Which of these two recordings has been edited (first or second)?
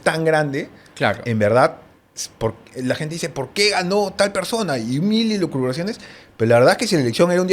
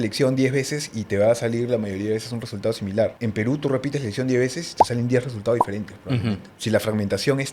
second